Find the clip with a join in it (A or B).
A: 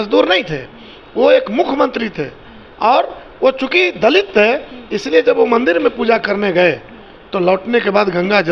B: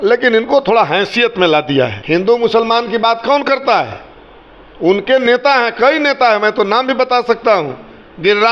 B